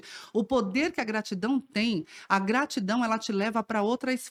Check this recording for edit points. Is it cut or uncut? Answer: uncut